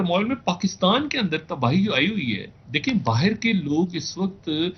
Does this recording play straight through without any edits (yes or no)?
yes